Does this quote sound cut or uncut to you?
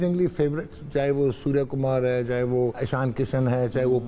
cut